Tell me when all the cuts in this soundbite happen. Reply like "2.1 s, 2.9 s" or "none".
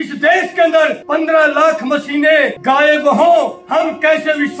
1.0 s, 2.5 s, 3.6 s